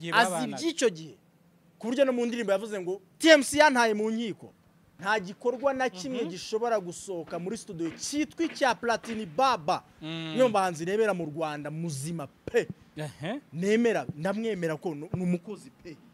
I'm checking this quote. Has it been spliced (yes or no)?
yes